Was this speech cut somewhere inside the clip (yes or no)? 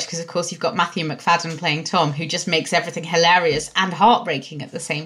no